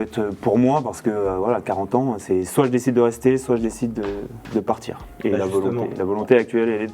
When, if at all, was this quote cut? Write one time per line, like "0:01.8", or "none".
none